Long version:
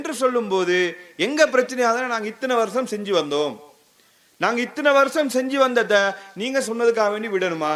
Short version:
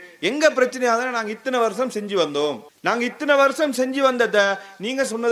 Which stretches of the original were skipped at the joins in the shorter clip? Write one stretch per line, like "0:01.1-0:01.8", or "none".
0:03.6-0:04.2